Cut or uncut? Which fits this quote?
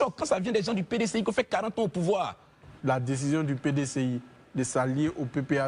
cut